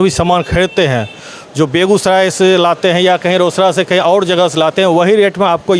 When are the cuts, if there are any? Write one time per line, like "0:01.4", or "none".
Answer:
none